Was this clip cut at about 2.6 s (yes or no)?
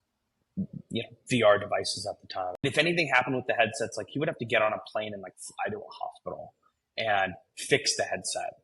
yes